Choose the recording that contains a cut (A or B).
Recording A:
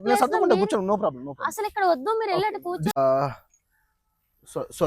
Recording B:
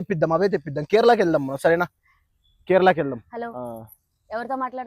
A